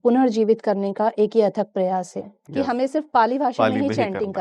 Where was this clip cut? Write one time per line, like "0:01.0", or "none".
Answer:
0:02.4